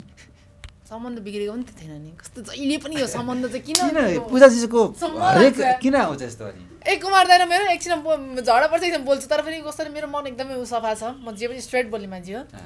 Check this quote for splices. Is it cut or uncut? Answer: uncut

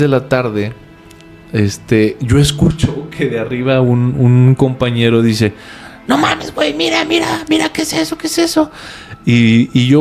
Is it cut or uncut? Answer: uncut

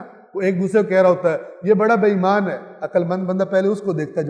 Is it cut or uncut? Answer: uncut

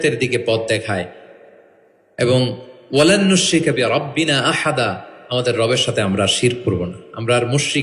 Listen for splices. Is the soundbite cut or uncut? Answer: uncut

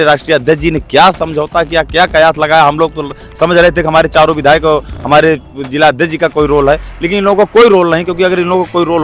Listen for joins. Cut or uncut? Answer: uncut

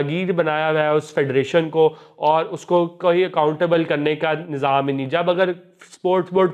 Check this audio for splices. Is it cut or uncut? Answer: uncut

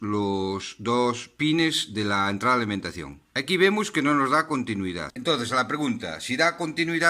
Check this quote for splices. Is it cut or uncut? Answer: cut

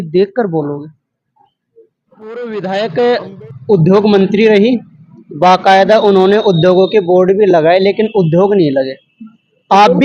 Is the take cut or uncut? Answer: cut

